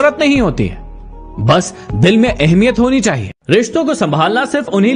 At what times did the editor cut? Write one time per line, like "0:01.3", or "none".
none